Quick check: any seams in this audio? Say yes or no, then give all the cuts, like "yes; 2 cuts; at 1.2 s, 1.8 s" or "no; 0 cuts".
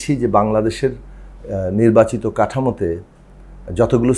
no; 0 cuts